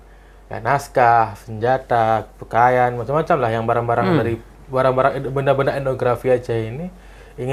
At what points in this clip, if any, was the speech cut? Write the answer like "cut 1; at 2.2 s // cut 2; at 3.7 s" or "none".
none